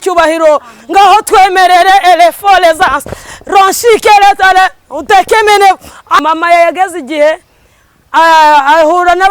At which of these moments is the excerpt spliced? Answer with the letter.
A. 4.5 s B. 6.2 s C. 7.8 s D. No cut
B